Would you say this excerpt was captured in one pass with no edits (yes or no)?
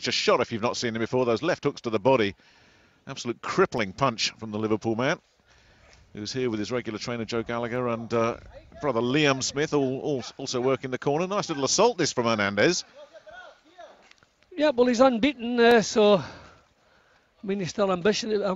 yes